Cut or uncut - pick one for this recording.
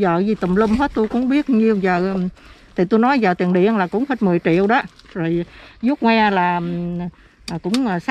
uncut